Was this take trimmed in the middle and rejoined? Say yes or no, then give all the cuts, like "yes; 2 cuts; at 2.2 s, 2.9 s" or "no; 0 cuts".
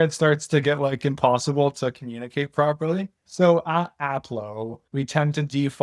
yes; 2 cuts; at 3.2 s, 4.8 s